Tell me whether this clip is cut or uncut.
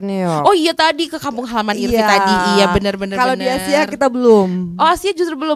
uncut